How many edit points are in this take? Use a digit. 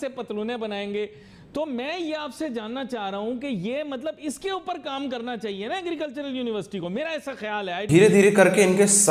0